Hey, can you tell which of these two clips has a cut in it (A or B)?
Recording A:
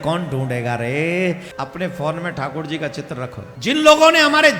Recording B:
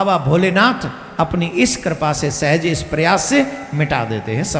A